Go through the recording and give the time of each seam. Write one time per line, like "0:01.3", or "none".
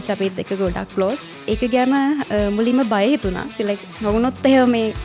0:01.3

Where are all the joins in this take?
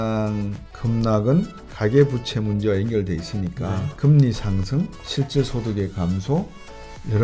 0:03.9
0:05.0

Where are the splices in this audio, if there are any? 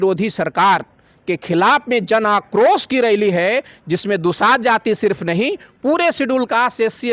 none

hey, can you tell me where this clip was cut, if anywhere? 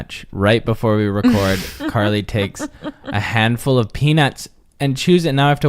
0:01.8

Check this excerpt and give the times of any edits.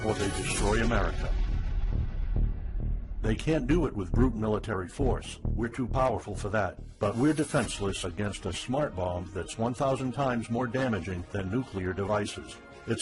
none

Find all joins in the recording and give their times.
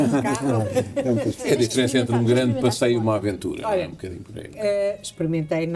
none

